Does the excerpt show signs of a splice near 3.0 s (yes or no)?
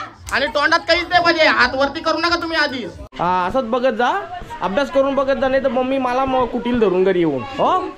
yes